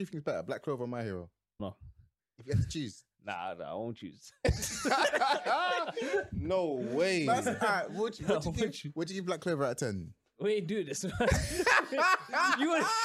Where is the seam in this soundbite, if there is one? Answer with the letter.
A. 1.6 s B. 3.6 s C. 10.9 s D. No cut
A